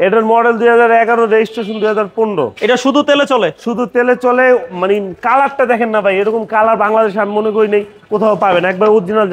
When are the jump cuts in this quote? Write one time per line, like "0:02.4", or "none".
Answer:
none